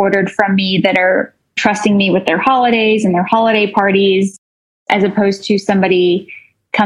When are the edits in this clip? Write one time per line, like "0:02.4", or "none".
0:04.7